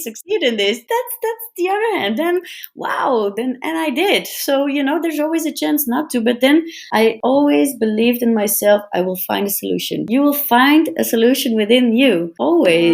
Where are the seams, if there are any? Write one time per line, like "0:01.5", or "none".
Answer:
0:10.0